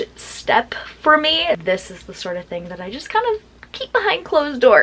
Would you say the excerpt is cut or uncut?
cut